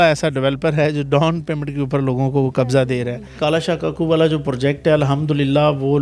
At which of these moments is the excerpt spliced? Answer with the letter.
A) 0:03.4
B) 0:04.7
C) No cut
A